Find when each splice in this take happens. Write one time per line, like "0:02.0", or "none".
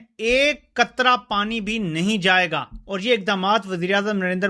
0:02.8